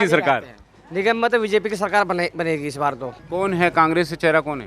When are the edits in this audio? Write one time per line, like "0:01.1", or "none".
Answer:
0:03.1

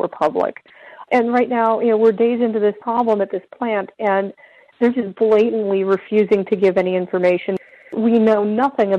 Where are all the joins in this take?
0:02.8
0:07.9

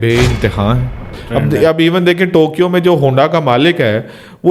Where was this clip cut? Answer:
0:01.2

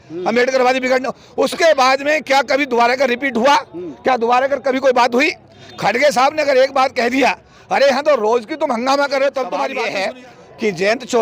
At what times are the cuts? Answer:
0:09.7

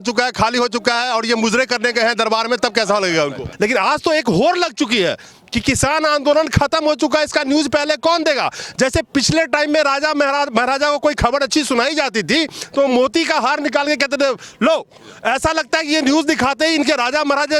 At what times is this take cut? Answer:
0:03.5

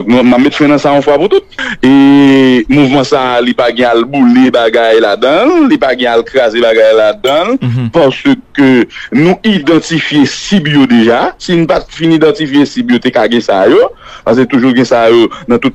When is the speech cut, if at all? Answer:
0:01.5

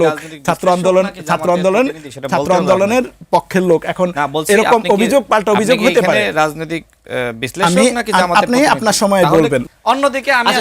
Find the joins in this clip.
0:09.6

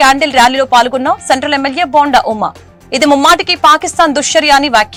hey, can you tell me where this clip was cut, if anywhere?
none

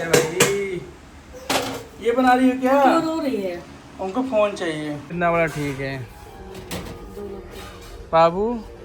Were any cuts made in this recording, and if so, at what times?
0:05.1

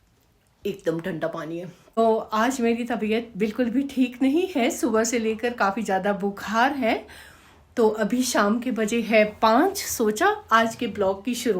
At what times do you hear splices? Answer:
0:02.0

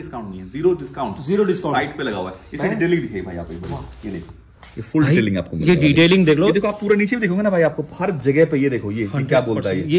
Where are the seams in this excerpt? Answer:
none

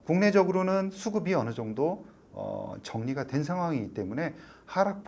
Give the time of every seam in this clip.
none

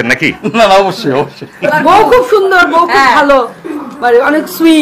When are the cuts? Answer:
0:01.8

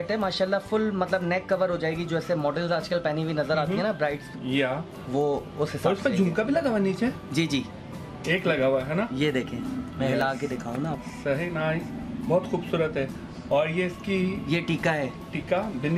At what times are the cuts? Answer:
none

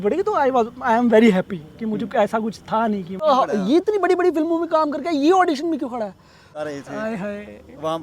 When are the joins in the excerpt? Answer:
0:03.2
0:06.6

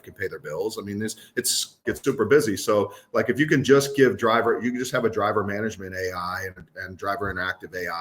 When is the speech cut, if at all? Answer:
0:01.8

